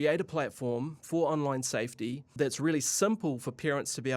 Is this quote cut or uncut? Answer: cut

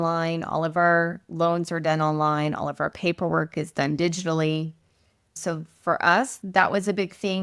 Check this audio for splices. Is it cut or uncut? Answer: cut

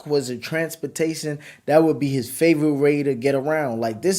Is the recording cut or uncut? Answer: uncut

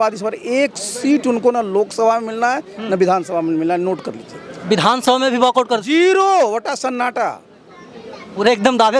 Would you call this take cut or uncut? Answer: uncut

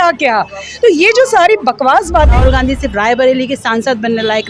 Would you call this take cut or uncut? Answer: cut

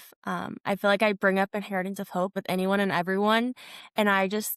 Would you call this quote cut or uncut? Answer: cut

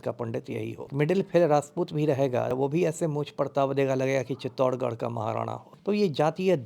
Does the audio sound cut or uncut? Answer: cut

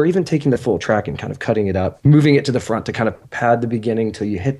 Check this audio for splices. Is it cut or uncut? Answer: cut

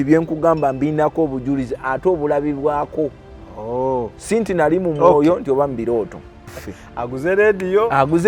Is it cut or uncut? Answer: cut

